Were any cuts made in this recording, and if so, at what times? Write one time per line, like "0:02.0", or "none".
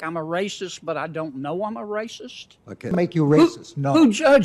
0:02.9